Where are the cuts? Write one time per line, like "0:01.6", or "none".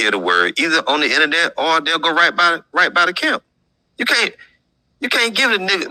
none